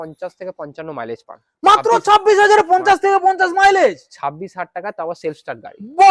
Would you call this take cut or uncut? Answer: uncut